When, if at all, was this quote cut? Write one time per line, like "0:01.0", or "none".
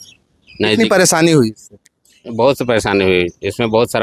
none